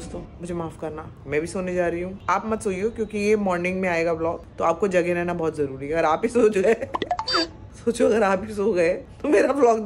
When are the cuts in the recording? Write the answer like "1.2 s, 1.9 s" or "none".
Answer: 1.2 s